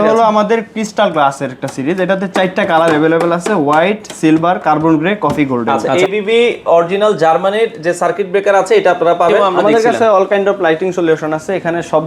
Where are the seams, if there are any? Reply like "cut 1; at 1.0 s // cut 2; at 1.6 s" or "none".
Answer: cut 1; at 5.8 s // cut 2; at 9.5 s